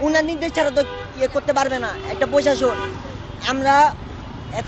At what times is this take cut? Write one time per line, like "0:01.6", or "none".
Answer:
none